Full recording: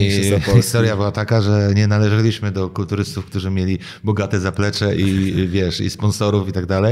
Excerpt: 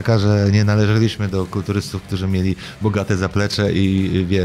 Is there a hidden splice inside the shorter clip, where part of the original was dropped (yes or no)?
no